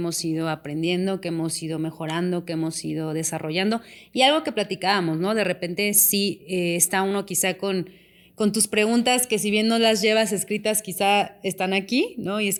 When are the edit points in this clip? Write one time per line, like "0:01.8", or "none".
none

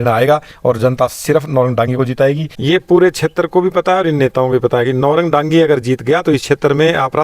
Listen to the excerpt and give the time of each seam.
0:02.5

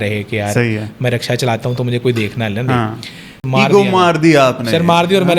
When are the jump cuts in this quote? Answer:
0:03.4

